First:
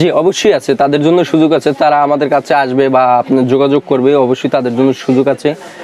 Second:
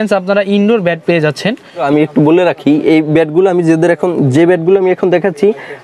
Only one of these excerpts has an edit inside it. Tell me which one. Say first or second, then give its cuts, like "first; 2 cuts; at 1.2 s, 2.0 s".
second; 1 cut; at 1.7 s